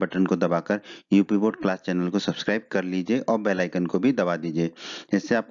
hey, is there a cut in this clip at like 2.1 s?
yes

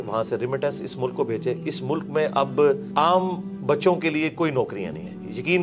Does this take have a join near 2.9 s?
yes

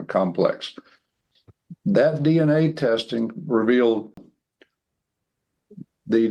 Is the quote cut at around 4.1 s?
yes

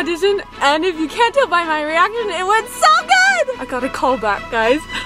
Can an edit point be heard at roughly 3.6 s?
yes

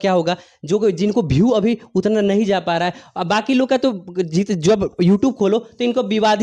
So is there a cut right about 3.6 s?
no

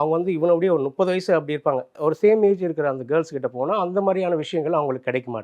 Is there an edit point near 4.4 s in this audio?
no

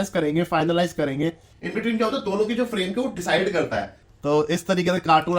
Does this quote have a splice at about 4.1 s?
yes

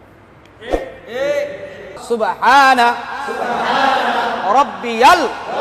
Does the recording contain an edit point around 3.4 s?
no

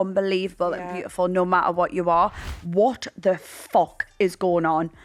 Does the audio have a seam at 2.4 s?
yes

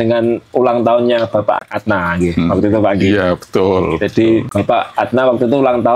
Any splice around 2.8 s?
no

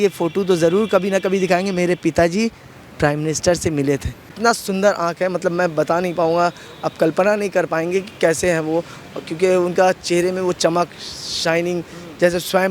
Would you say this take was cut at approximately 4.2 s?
yes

